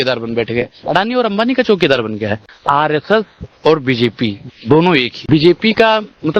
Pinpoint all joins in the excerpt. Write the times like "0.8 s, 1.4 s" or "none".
2.6 s, 5.1 s